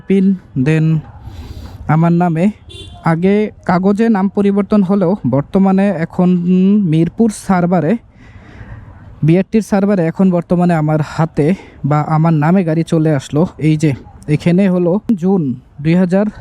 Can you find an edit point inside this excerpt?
yes; 1 cut; at 15.1 s

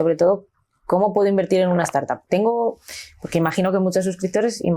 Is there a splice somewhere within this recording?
no; 0 cuts

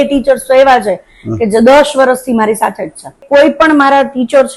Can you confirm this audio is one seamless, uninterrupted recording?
no; 1 cut; at 3.2 s

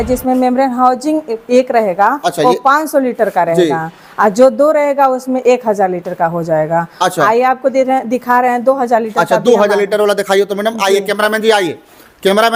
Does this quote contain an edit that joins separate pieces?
no; 0 cuts

